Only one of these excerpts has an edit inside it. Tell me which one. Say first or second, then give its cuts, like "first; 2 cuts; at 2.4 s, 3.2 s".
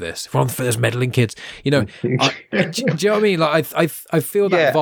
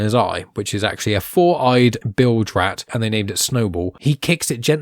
second; 3 cuts; at 2.0 s, 2.9 s, 4.0 s